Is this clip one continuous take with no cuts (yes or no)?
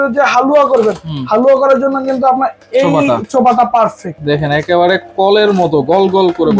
no